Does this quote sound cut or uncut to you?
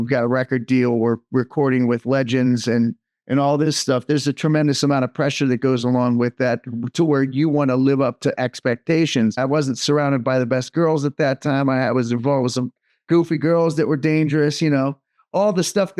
cut